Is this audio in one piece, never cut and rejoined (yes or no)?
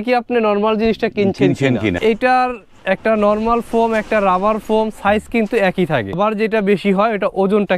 no